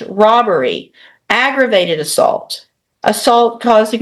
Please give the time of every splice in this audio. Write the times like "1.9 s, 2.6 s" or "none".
none